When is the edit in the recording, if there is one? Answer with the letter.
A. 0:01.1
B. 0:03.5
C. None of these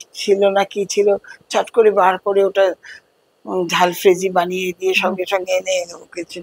C